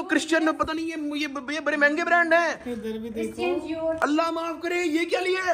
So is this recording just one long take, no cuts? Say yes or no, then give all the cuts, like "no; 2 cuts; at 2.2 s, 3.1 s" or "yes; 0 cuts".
yes; 0 cuts